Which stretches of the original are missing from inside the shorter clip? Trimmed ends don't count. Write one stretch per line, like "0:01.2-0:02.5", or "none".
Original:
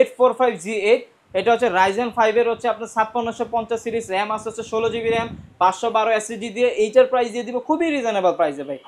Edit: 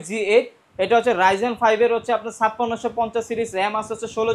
none